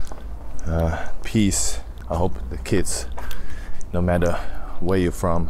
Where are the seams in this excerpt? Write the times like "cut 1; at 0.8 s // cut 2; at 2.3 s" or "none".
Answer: cut 1; at 1.9 s